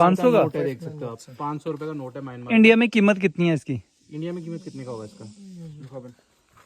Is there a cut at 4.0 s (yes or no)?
no